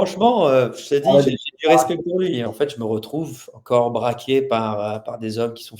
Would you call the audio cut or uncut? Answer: cut